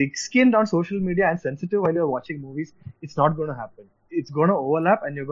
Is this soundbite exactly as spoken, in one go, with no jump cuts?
yes; 0 cuts

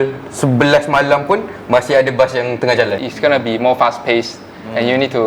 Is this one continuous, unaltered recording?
no; 1 cut; at 3.0 s

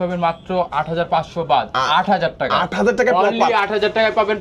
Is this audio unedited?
yes; 0 cuts

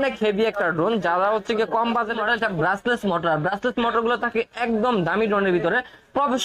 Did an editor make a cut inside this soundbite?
yes; 1 cut; at 2.2 s

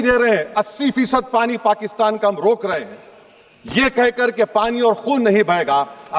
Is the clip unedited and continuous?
yes; 0 cuts

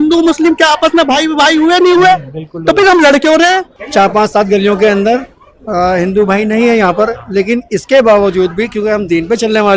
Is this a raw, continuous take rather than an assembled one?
no; 1 cut; at 3.8 s

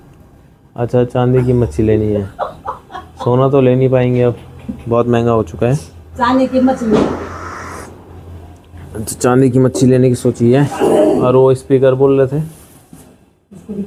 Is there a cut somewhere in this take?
no; 0 cuts

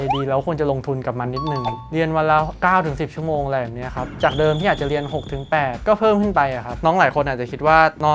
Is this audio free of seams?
yes; 0 cuts

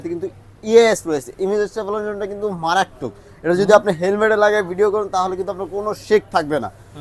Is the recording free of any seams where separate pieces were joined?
yes; 0 cuts

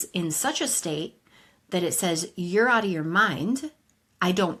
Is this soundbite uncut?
yes; 0 cuts

